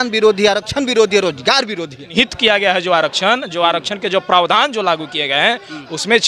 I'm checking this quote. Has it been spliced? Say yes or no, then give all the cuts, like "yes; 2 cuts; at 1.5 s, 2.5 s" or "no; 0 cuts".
yes; 1 cut; at 2.1 s